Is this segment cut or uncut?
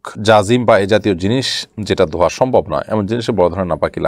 uncut